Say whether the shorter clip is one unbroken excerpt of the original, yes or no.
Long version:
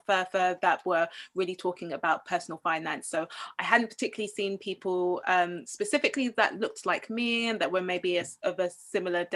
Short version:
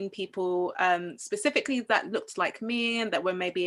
yes